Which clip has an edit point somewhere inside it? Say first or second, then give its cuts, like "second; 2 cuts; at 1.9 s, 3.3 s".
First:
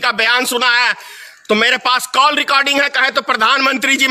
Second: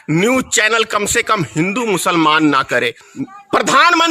second; 1 cut; at 3.1 s